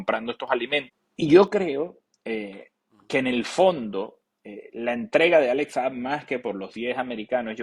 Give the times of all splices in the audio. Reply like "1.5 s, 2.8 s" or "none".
1.0 s